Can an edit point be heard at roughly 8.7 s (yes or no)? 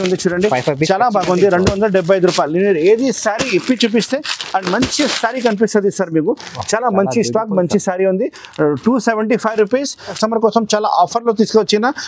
no